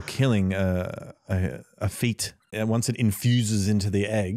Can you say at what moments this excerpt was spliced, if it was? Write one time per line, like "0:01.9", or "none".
0:02.5